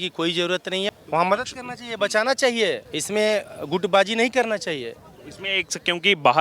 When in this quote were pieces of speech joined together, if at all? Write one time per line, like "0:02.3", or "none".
0:01.0
0:02.9
0:03.6